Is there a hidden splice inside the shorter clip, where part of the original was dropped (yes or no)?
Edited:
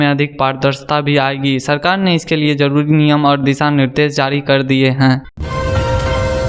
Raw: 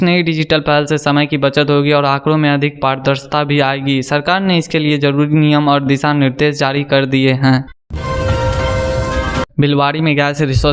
yes